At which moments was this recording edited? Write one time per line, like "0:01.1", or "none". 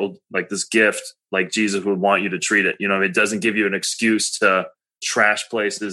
0:05.0

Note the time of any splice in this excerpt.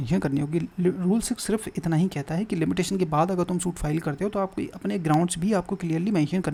none

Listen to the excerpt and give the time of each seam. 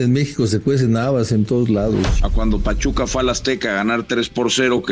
0:02.2

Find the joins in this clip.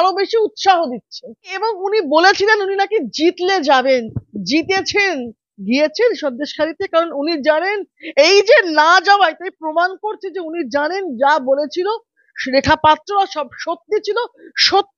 0:01.5

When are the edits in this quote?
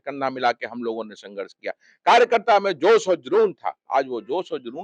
none

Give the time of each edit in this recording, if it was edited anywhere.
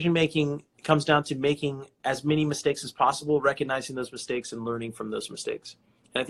0:01.9

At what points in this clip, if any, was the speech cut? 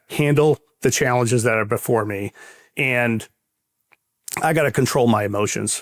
none

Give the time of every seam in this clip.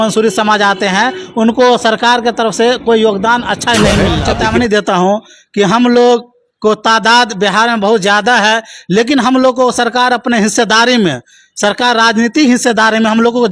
0:04.3

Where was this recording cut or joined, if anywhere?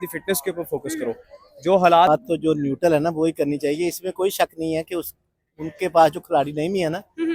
0:02.1

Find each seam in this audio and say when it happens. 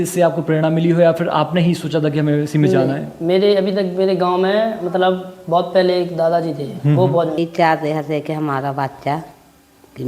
0:07.4

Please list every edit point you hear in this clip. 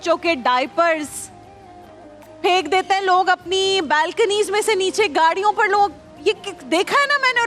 none

